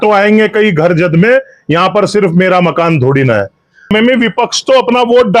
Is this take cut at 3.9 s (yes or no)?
yes